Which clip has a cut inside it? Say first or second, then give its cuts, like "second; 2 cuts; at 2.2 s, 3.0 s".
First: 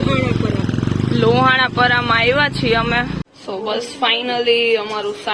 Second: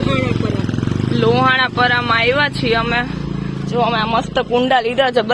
first; 1 cut; at 3.2 s